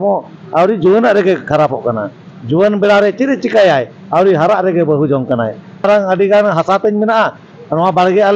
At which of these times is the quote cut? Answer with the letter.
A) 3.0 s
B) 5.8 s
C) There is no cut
B